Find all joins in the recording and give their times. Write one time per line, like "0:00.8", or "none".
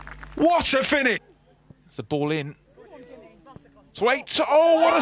0:01.3